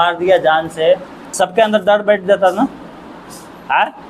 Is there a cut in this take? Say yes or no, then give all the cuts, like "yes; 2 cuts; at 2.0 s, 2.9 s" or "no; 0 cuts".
yes; 1 cut; at 1.2 s